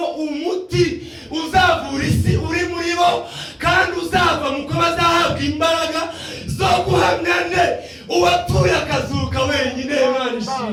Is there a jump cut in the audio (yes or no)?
no